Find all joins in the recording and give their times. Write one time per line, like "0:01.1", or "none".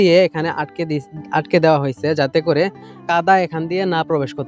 0:03.0